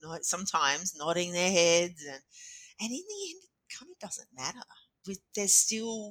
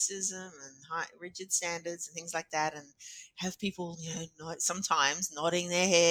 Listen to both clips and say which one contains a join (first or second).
first